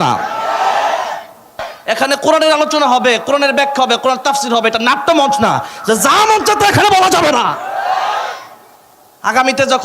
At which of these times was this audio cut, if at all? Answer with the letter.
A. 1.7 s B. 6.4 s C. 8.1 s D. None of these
A